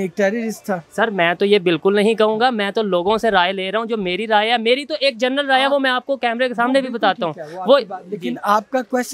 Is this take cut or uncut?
uncut